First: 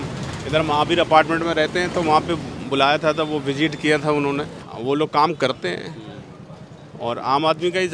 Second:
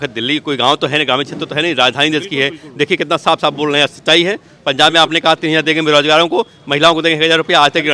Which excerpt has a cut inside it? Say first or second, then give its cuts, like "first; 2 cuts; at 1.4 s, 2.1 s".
first; 1 cut; at 4.6 s